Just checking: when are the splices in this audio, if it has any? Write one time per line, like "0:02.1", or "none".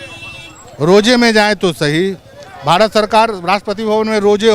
none